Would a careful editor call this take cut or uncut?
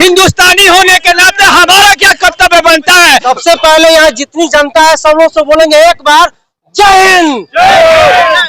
cut